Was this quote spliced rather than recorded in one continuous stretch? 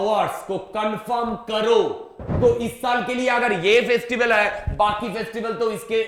yes; 1 cut; at 2.1 s

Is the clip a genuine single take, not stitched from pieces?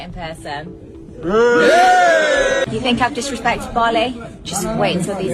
no; 1 cut; at 2.7 s

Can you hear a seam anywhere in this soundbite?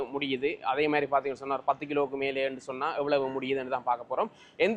no; 0 cuts

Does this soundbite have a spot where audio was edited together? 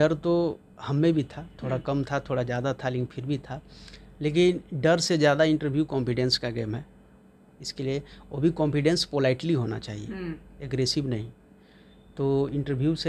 no; 0 cuts

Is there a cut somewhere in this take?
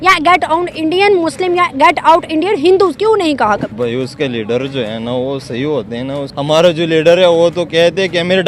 yes; 2 cuts; at 3.7 s, 6.3 s

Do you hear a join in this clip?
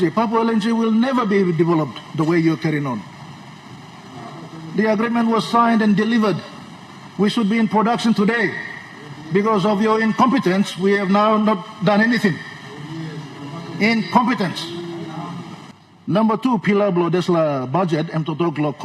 yes; 1 cut; at 15.7 s

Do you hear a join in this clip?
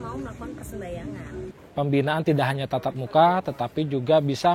yes; 1 cut; at 1.6 s

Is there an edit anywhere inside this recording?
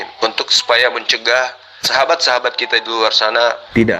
yes; 1 cut; at 1.8 s

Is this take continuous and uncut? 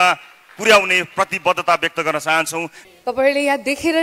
no; 1 cut; at 2.8 s

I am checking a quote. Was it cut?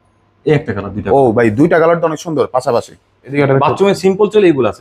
yes; 1 cut; at 3.4 s

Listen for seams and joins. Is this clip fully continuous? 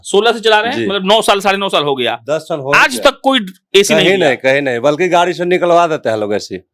yes; 0 cuts

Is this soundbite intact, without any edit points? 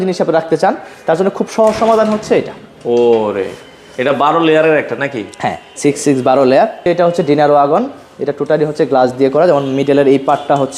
no; 1 cut; at 6.9 s

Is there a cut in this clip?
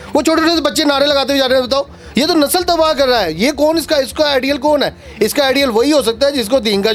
no; 0 cuts

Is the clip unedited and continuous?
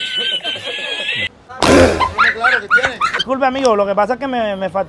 no; 2 cuts; at 1.3 s, 3.2 s

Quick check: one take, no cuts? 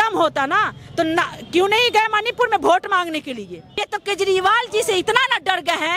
no; 1 cut; at 3.9 s

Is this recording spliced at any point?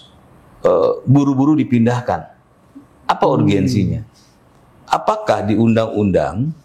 no; 0 cuts

